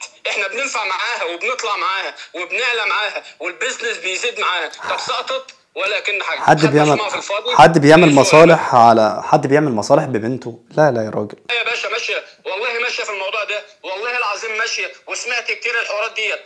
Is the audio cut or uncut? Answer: uncut